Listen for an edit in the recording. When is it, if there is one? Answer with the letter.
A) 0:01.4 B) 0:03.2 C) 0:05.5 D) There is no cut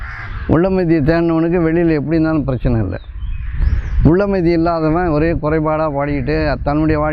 D